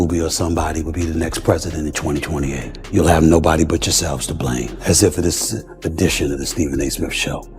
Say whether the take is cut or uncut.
cut